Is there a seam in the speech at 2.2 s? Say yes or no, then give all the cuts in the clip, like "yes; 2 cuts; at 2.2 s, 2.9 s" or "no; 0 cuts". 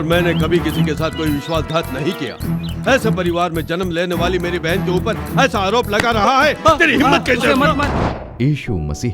no; 1 cut; at 8.0 s